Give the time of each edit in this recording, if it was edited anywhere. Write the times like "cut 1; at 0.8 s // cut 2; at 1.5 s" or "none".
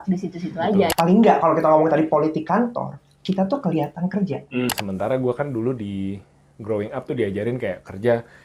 cut 1; at 0.9 s // cut 2; at 4.7 s